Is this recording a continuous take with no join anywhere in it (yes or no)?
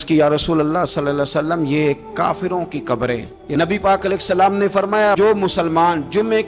no